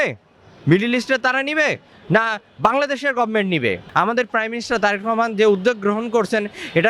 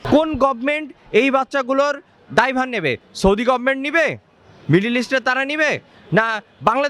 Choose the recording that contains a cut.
first; 1 cut; at 3.8 s

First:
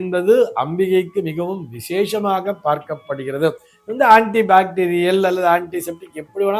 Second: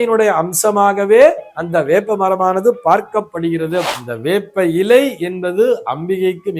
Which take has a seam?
second; 1 cut; at 4.0 s

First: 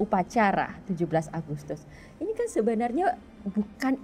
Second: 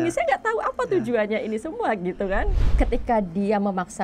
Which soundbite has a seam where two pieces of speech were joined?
second; 1 cut; at 2.6 s

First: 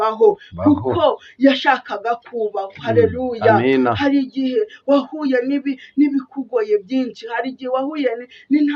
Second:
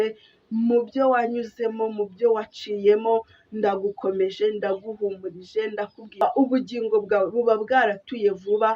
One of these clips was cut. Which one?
second; 1 cut; at 6.2 s

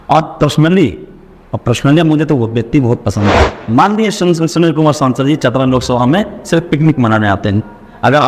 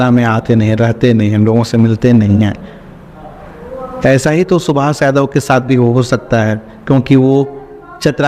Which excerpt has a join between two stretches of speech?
first; 1 cut; at 3.5 s

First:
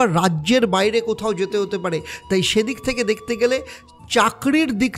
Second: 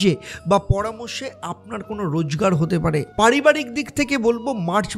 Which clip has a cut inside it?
second; 1 cut; at 3.1 s

